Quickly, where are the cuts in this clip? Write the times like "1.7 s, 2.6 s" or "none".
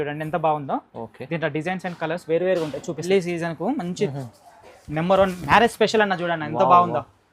3.0 s